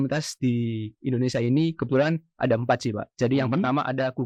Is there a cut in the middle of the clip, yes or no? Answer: no